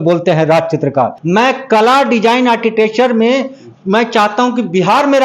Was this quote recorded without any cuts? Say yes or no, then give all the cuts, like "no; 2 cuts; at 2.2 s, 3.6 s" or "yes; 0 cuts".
no; 1 cut; at 1.2 s